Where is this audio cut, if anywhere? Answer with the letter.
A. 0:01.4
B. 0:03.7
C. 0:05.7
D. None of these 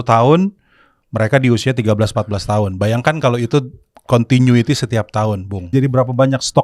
C